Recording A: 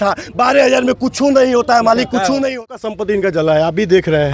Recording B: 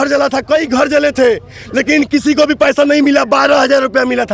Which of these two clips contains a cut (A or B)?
A